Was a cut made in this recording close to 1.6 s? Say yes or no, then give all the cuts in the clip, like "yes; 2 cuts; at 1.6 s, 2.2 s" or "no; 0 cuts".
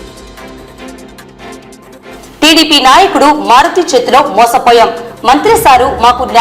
yes; 1 cut; at 1.6 s